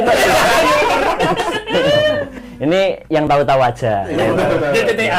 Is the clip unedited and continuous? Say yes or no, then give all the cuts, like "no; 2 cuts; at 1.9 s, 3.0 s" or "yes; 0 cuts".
no; 1 cut; at 2.3 s